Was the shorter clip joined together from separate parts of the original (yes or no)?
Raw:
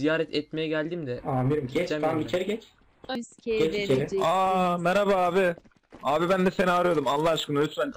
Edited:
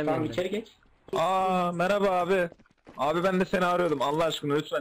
yes